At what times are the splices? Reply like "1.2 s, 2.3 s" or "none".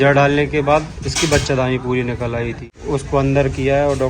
2.7 s